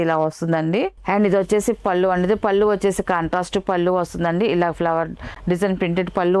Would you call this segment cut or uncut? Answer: uncut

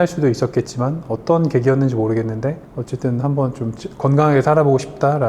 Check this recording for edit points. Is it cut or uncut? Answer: uncut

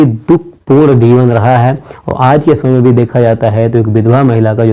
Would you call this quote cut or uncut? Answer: uncut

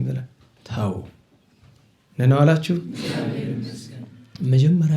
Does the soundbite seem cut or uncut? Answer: uncut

